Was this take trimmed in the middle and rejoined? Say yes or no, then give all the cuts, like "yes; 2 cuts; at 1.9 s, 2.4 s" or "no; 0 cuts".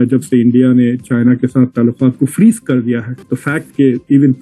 yes; 1 cut; at 3.4 s